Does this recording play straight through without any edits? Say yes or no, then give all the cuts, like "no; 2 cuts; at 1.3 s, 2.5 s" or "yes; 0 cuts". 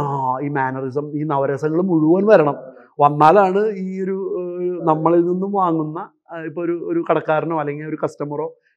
yes; 0 cuts